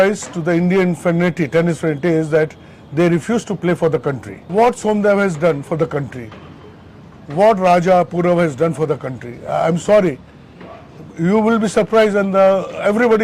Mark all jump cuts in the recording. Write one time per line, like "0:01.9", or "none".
0:04.3

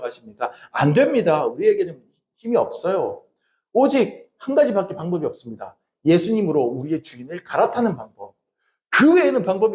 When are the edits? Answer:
none

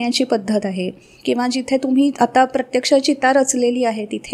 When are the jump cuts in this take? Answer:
none

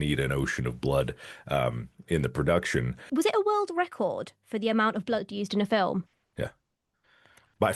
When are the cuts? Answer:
0:03.0
0:06.2

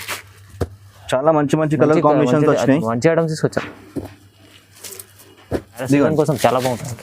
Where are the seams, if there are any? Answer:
0:05.8

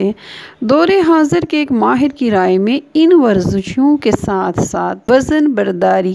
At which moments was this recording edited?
0:05.0

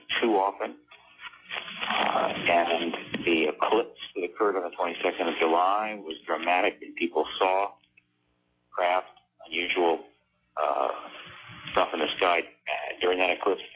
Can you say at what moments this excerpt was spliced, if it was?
0:08.7

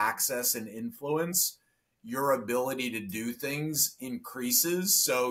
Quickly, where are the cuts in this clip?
none

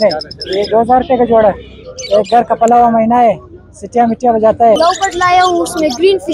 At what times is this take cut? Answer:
0:04.8

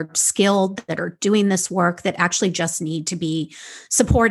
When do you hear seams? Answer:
none

